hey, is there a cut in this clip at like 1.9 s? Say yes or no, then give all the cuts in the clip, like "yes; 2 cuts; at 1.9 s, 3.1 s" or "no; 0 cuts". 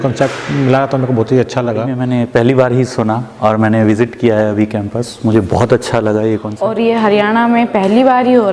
yes; 2 cuts; at 1.9 s, 6.5 s